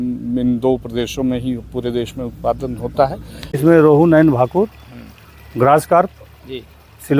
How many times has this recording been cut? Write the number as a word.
one